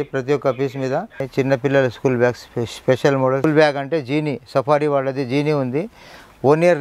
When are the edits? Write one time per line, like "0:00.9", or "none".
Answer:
0:01.3
0:03.4